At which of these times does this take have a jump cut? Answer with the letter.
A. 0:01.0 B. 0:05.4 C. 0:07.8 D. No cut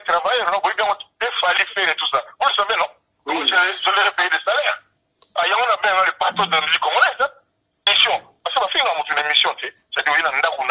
C